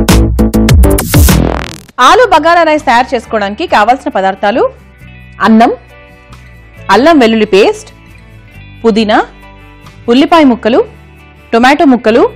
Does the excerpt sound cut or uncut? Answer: cut